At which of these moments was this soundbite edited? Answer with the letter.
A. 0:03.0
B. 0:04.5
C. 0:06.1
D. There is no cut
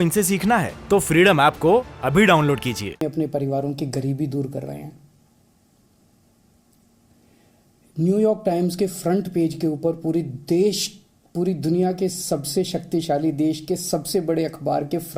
A